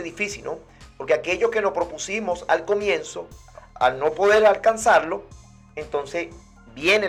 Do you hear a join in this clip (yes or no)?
no